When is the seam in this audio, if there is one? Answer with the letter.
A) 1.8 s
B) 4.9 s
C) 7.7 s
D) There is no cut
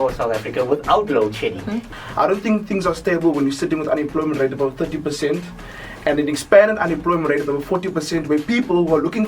A